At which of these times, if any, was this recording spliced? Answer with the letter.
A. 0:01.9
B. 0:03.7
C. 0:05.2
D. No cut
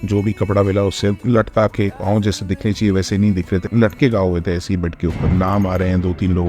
C